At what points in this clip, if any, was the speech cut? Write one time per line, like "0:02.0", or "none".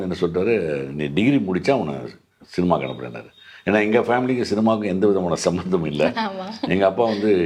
none